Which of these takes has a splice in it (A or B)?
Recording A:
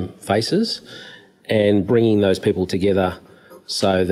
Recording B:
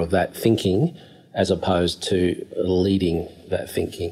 B